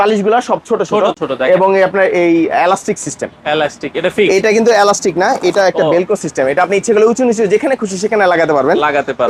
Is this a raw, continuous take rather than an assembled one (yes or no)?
yes